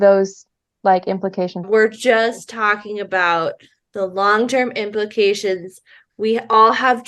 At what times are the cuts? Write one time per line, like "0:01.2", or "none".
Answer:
0:01.6